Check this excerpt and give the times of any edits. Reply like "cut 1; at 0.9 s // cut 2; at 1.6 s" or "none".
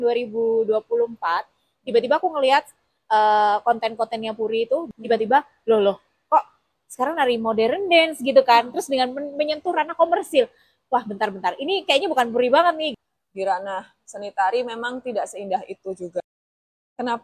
cut 1; at 4.9 s // cut 2; at 12.9 s // cut 3; at 16.2 s